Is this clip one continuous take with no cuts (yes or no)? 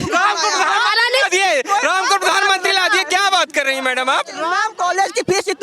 no